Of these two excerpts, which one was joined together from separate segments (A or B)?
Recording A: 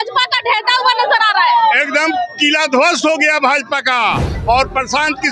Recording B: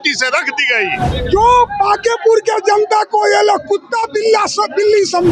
B